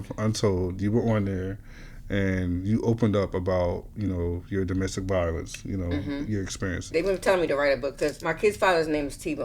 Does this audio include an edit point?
yes; 2 cuts; at 6.9 s, 8.2 s

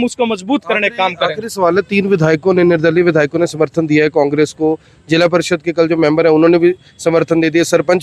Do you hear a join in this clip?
no; 0 cuts

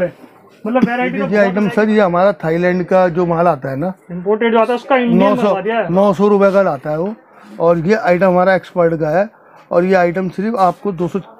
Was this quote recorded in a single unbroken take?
no; 1 cut; at 1.2 s

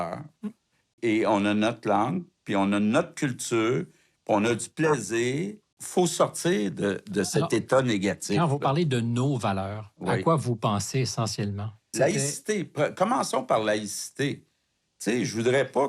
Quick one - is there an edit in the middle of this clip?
yes; 3 cuts; at 0.9 s, 5.6 s, 11.9 s

